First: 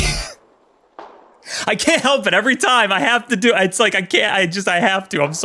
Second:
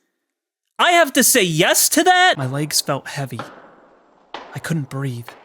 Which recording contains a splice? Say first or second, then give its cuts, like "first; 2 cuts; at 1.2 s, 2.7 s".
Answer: second; 1 cut; at 2.4 s